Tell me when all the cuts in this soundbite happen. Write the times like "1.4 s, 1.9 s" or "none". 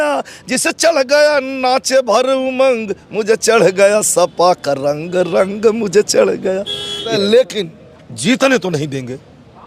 7.1 s